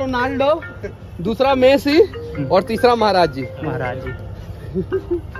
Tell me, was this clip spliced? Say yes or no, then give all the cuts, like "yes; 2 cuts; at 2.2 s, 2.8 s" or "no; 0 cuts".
no; 0 cuts